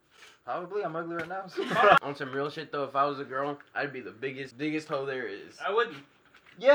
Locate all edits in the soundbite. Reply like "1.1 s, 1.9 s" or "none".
2.0 s, 4.5 s